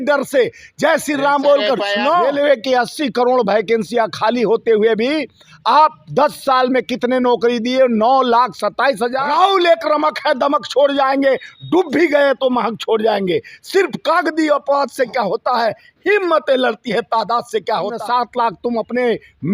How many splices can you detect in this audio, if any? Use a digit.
3